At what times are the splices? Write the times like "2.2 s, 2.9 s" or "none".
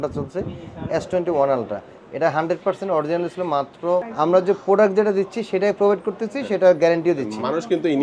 4.1 s